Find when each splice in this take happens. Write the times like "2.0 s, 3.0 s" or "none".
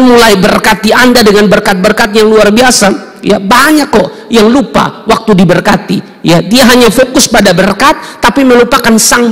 none